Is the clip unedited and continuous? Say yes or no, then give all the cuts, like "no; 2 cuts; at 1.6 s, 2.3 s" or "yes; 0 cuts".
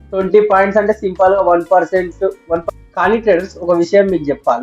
no; 1 cut; at 2.6 s